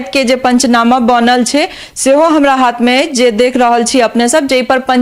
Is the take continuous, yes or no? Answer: yes